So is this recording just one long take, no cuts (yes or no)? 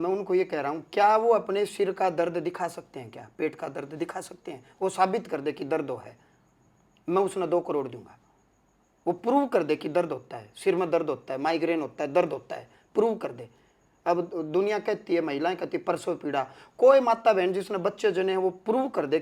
yes